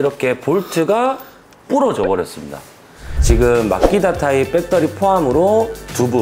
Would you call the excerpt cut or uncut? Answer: cut